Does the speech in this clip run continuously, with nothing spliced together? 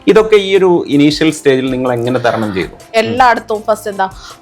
no; 1 cut; at 2.8 s

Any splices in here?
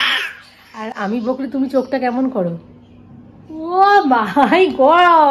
no; 0 cuts

